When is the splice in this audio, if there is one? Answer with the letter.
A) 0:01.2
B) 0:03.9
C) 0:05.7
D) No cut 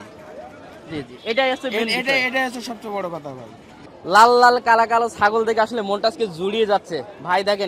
B